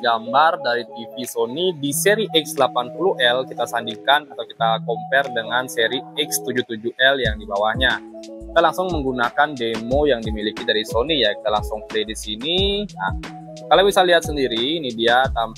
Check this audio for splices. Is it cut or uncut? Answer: uncut